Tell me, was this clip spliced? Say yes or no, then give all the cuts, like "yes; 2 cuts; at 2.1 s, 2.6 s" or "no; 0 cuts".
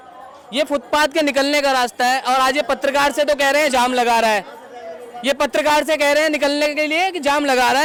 no; 0 cuts